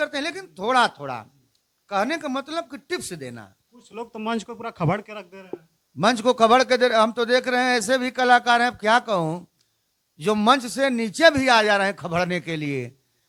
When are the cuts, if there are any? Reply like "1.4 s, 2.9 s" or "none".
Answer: none